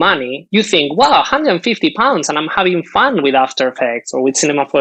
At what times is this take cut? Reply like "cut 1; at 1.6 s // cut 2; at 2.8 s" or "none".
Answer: none